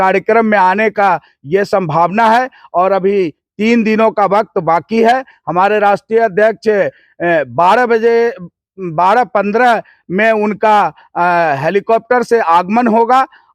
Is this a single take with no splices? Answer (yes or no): yes